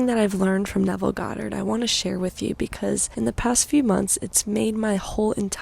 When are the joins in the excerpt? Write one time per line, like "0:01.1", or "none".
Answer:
0:03.1